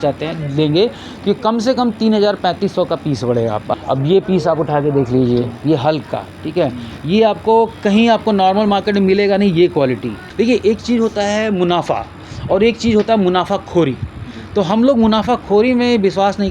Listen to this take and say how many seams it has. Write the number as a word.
two